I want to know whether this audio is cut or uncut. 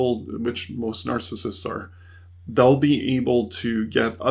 uncut